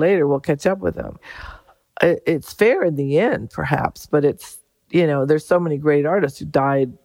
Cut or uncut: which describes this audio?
uncut